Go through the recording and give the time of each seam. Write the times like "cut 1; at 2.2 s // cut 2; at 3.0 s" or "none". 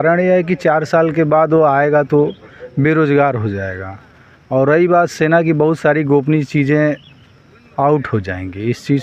none